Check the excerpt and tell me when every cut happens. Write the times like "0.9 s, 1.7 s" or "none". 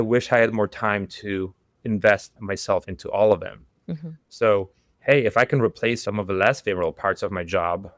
none